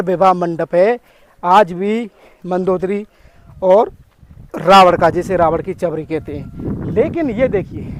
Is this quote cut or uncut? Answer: uncut